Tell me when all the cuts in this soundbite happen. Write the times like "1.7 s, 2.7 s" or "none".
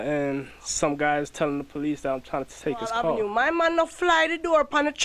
3.2 s